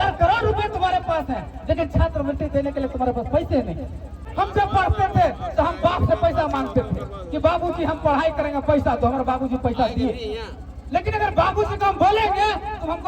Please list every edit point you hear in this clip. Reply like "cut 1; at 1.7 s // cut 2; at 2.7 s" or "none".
cut 1; at 4.2 s